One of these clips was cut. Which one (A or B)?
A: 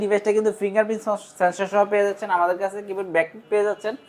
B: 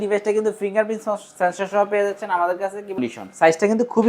B